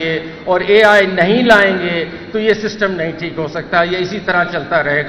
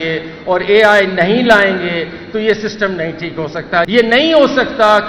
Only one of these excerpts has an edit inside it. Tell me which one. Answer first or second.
second